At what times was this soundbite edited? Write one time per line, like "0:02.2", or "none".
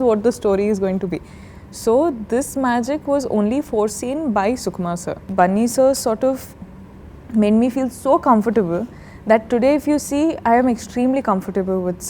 0:05.2